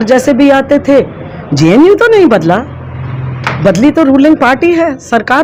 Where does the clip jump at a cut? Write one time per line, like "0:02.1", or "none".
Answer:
none